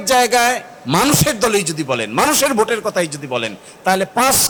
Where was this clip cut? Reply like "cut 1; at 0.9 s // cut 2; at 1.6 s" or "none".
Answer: none